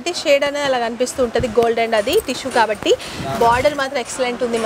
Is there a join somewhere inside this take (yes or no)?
no